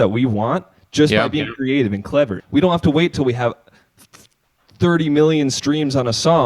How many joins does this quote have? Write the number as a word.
one